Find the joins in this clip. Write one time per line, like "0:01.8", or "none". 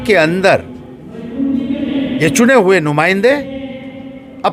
none